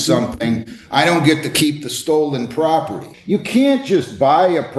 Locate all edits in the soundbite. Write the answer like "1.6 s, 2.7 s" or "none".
3.1 s